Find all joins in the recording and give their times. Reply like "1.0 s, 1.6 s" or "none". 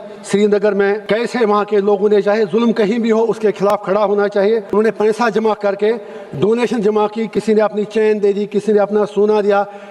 1.0 s, 4.7 s